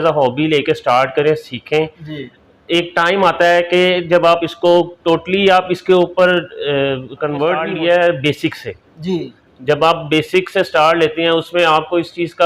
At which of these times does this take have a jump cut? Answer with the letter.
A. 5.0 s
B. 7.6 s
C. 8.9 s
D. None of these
B